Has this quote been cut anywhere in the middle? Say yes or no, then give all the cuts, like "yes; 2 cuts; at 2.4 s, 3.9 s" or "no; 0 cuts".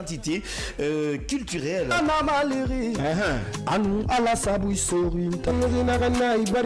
yes; 1 cut; at 5.6 s